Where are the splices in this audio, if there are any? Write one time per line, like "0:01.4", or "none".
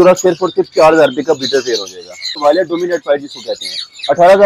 0:02.4